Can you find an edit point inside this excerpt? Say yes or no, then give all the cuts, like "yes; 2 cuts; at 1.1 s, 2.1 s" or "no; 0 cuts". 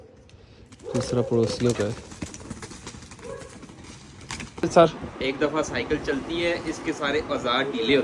yes; 1 cut; at 4.6 s